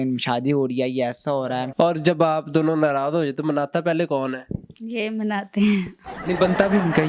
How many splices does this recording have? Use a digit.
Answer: 1